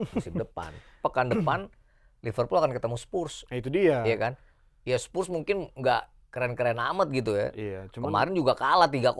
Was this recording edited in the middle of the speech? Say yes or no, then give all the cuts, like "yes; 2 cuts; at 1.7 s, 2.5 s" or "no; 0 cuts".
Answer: yes; 1 cut; at 1.0 s